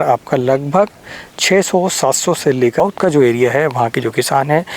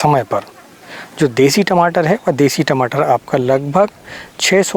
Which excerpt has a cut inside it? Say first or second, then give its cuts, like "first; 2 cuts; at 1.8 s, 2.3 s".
first; 1 cut; at 2.8 s